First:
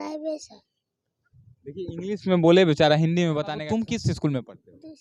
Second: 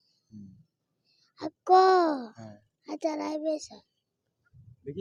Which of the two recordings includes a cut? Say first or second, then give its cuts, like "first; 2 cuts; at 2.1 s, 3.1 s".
first; 1 cut; at 3.4 s